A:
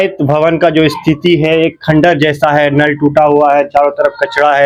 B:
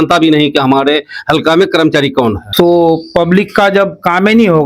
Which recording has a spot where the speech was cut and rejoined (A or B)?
B